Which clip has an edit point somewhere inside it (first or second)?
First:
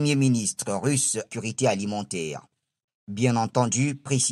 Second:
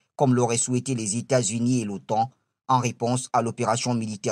first